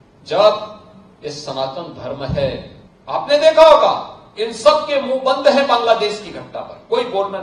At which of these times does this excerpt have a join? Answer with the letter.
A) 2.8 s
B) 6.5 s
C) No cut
A